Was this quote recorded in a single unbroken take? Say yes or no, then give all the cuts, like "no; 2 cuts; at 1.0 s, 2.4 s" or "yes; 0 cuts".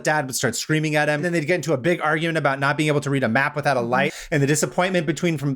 no; 2 cuts; at 1.2 s, 4.1 s